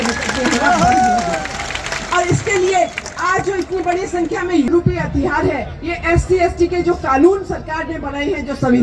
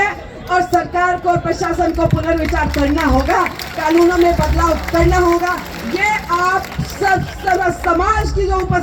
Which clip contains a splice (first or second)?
first